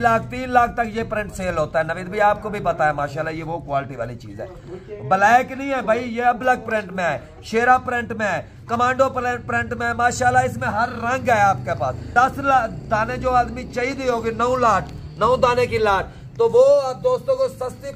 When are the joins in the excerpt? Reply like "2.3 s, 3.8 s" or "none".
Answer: none

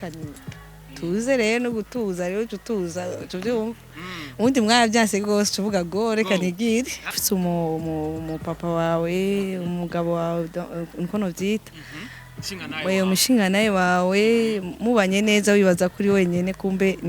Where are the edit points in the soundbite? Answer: 7.2 s

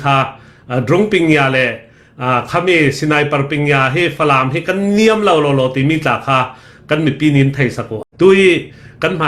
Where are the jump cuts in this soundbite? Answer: 7.9 s

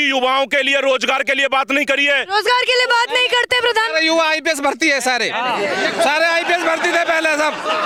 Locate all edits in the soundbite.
none

